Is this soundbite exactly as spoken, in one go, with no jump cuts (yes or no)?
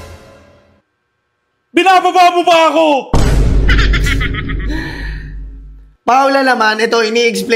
yes